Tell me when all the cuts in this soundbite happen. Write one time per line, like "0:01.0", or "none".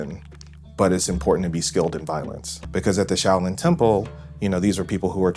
0:02.6